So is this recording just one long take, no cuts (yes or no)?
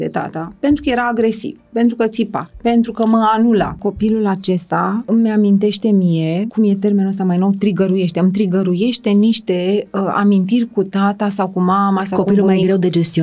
no